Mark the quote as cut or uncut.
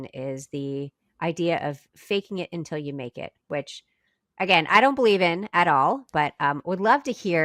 uncut